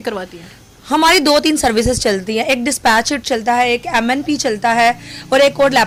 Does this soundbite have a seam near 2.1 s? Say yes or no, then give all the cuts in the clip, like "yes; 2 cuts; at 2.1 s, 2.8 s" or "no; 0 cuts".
no; 0 cuts